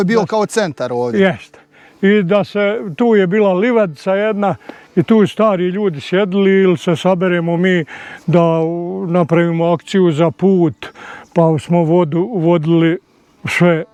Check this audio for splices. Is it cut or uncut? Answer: uncut